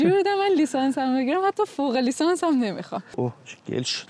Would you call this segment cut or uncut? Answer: cut